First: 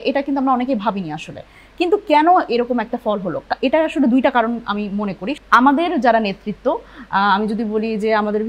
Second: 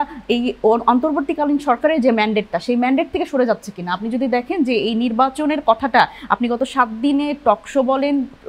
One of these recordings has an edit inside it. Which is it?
first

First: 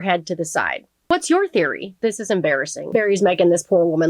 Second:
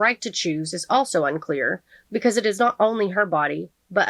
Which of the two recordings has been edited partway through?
first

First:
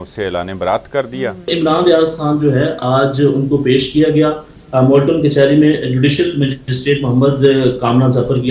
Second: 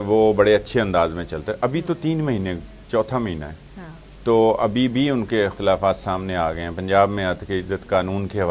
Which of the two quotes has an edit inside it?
first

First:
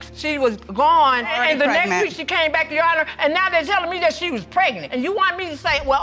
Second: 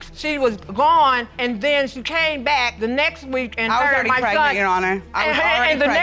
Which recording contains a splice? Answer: first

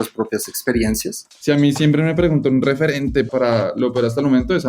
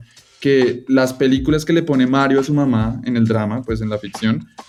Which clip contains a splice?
first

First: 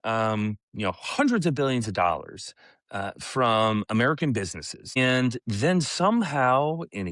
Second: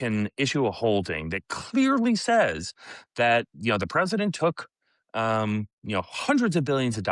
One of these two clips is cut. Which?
first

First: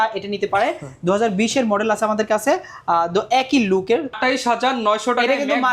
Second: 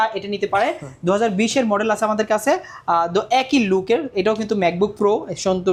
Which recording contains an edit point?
first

